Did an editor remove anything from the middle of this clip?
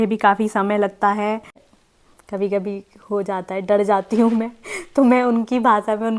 yes; 1 cut; at 1.6 s

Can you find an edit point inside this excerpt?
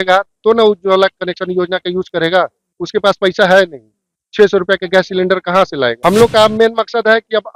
yes; 1 cut; at 6.0 s

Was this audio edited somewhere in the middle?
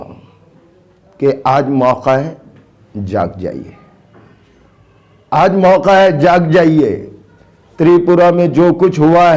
no; 0 cuts

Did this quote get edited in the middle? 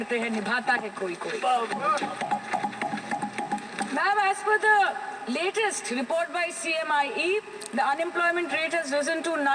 no; 0 cuts

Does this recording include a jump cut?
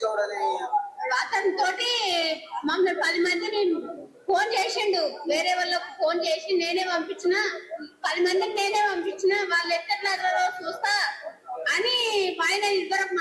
no; 0 cuts

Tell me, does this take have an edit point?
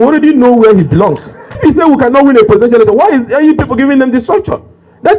yes; 1 cut; at 1.6 s

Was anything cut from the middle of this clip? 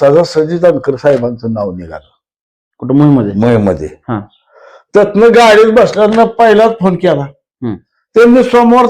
no; 0 cuts

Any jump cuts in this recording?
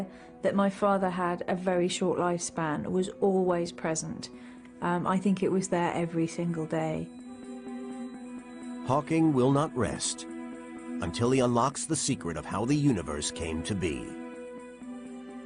yes; 1 cut; at 3.1 s

